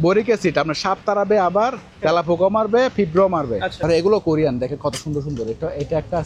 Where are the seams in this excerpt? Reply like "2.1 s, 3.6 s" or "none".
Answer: 3.7 s